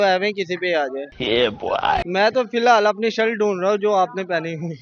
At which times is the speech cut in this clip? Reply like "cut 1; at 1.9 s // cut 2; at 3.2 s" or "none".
cut 1; at 2.0 s